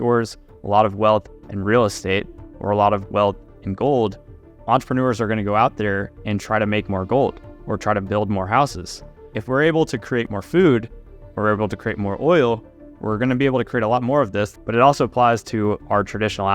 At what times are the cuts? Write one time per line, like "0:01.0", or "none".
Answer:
0:04.6
0:09.3
0:10.3
0:14.5